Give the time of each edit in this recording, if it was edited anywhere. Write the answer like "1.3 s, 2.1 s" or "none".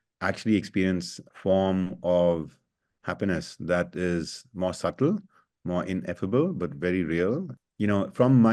1.2 s, 7.5 s